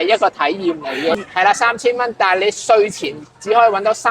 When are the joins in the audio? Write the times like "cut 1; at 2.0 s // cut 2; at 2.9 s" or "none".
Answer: cut 1; at 1.2 s